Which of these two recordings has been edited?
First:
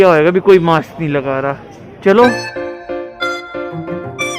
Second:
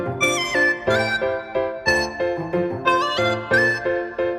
first; 1 cut; at 2.6 s

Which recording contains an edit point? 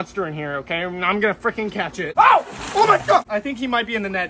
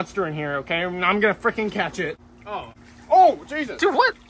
first; 2 cuts; at 2.0 s, 3.3 s

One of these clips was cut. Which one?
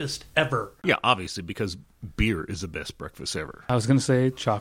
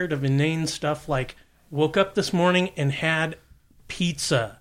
first; 2 cuts; at 0.9 s, 3.6 s

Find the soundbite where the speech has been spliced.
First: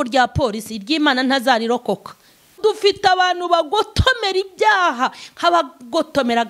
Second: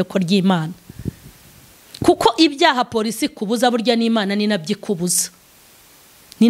first; 1 cut; at 2.5 s

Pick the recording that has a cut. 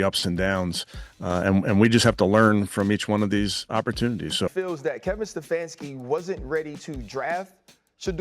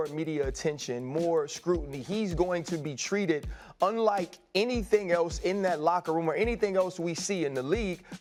first; 1 cut; at 4.4 s

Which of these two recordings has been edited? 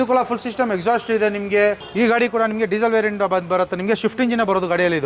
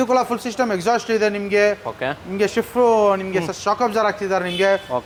first; 1 cut; at 1.8 s

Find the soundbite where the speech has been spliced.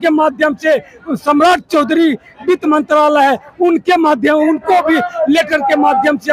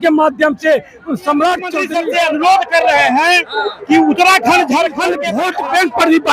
second; 2 cuts; at 1.8 s, 5.2 s

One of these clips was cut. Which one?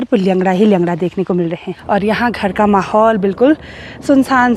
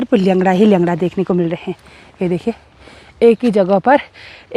first; 1 cut; at 1.7 s

